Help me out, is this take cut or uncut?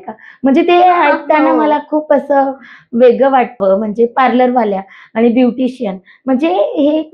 cut